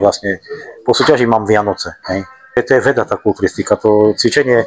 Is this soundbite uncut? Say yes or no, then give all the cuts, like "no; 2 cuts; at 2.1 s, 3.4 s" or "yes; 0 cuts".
no; 1 cut; at 2.6 s